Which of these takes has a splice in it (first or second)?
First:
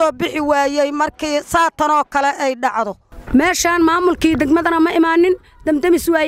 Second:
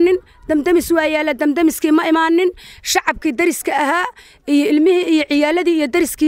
first